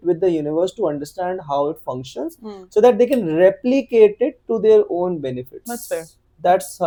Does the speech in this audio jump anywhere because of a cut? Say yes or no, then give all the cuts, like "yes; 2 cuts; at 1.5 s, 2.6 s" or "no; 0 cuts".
no; 0 cuts